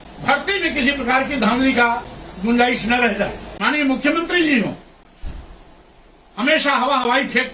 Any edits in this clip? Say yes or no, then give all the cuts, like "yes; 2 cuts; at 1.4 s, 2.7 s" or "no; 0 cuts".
yes; 1 cut; at 3.5 s